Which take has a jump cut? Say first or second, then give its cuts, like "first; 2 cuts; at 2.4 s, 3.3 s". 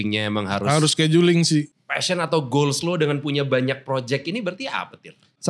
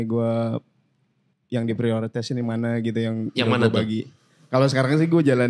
first; 1 cut; at 1.7 s